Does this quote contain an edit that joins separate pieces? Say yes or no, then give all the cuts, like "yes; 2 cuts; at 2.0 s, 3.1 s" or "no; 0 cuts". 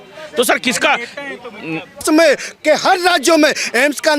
yes; 1 cut; at 2.0 s